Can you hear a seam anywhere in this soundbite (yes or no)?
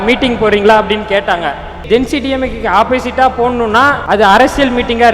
yes